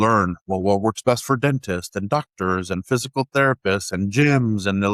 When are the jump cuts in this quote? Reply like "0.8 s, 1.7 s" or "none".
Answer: none